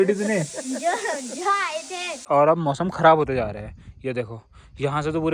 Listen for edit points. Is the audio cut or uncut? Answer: uncut